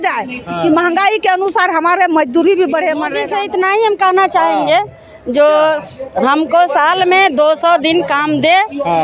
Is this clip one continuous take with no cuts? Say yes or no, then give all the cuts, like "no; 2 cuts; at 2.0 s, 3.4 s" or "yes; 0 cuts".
no; 1 cut; at 3.2 s